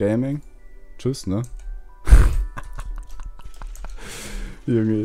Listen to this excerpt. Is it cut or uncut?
uncut